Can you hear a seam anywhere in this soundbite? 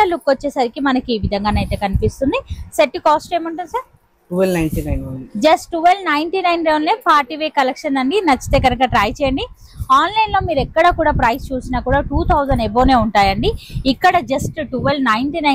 no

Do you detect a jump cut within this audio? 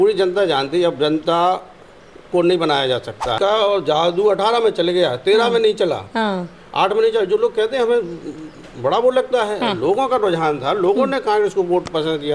yes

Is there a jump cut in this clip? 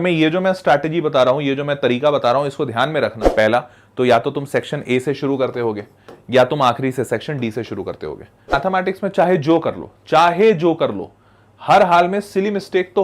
yes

